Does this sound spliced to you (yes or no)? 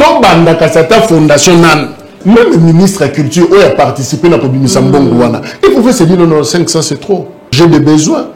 yes